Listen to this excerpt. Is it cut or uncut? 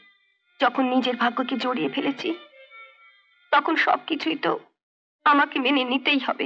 uncut